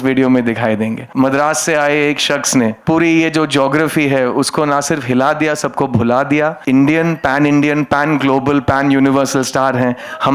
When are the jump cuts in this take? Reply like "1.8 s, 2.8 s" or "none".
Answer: 1.0 s, 2.8 s, 6.6 s